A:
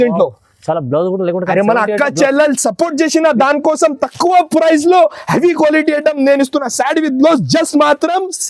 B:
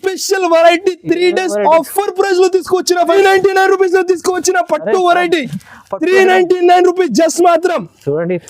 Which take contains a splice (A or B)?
B